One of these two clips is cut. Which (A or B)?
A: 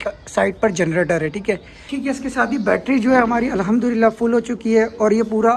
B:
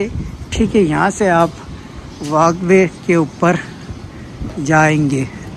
A